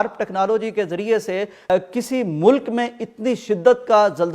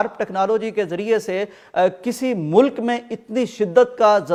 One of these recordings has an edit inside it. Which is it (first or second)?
first